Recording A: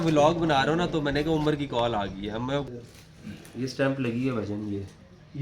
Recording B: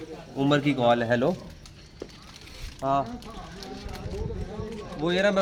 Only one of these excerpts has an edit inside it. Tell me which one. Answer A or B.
A